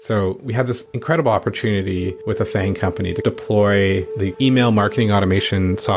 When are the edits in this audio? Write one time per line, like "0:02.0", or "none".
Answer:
0:00.9
0:02.2